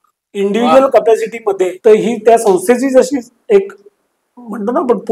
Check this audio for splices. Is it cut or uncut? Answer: cut